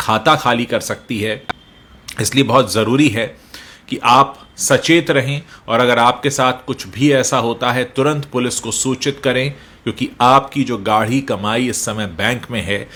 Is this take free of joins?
yes; 0 cuts

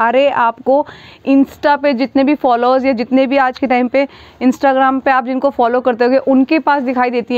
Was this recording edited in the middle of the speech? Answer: no; 0 cuts

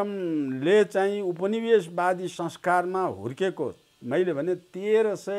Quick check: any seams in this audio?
no; 0 cuts

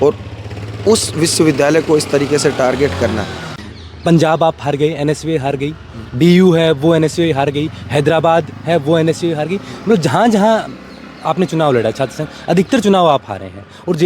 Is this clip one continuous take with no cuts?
no; 1 cut; at 3.5 s

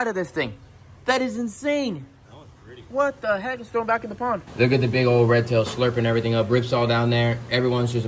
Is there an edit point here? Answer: yes; 1 cut; at 4.5 s

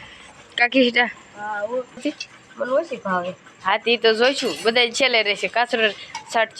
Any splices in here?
yes; 1 cut; at 2.0 s

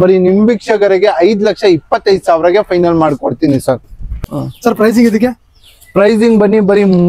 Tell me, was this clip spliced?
yes; 1 cut; at 4.1 s

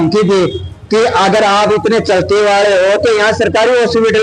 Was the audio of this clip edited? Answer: no; 0 cuts

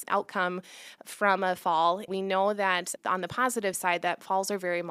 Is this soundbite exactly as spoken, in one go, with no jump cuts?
no; 1 cut; at 2.1 s

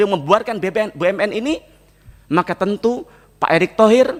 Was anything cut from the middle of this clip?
no; 0 cuts

